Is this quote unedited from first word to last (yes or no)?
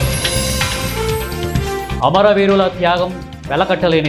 yes